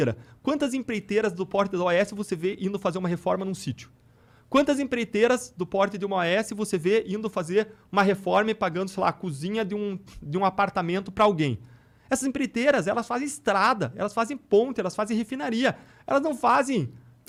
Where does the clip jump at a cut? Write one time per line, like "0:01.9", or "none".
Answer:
none